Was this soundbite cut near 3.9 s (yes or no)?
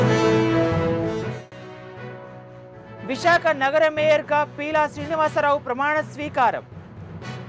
no